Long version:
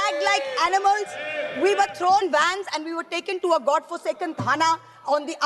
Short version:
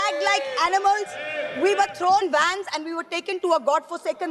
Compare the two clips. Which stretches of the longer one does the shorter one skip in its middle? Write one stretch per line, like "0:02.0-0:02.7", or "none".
none